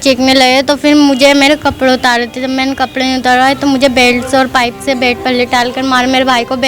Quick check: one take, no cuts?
yes; 0 cuts

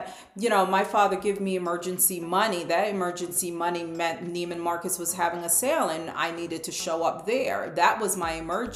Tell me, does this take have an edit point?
no; 0 cuts

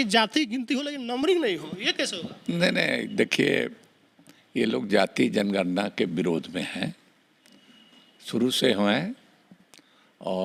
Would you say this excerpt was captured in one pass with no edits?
yes; 0 cuts

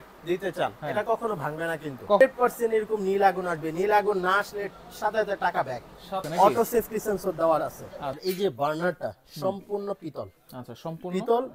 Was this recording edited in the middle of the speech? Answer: yes; 3 cuts; at 2.2 s, 6.3 s, 8.2 s

